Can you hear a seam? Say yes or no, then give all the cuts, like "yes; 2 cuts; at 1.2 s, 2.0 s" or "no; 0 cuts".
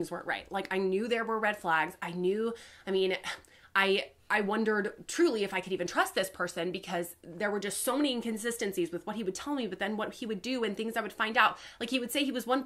no; 0 cuts